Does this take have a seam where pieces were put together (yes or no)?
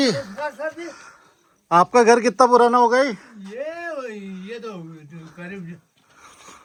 no